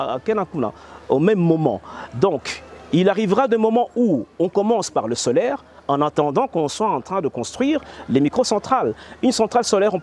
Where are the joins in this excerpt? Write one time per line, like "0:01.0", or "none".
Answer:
none